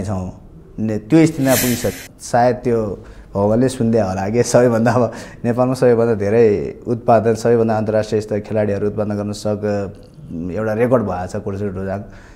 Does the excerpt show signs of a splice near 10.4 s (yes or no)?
no